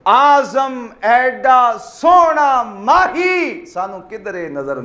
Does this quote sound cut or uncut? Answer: uncut